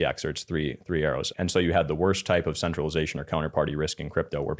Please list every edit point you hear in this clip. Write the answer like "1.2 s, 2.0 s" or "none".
1.3 s